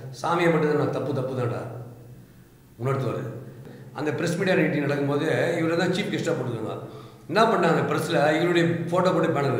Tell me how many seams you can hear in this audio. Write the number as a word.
one